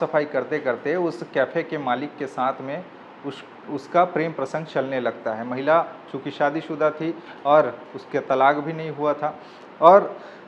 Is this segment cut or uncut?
uncut